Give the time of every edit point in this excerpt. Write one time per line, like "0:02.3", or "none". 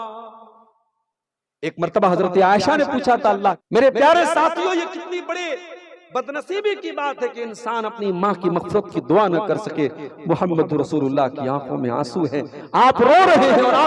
0:03.6